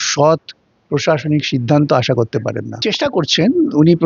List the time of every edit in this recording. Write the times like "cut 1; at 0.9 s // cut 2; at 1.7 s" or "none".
cut 1; at 2.8 s

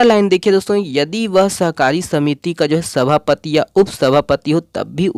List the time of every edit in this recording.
none

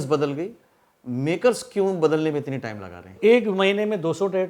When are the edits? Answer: cut 1; at 3.2 s

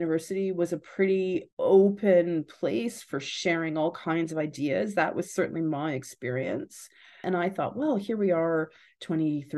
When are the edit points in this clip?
cut 1; at 1.5 s // cut 2; at 7.2 s

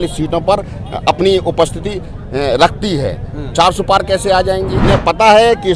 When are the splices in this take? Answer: cut 1; at 4.7 s

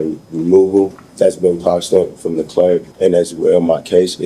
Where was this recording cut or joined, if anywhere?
cut 1; at 1.0 s // cut 2; at 2.9 s

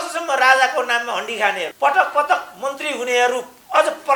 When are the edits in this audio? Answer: cut 1; at 1.7 s

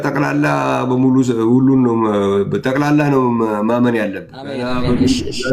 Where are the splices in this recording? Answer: cut 1; at 4.6 s

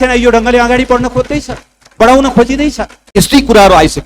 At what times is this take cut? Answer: cut 1; at 2.9 s

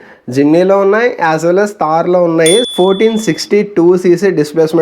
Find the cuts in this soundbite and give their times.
cut 1; at 2.7 s

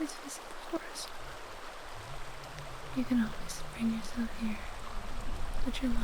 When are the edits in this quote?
none

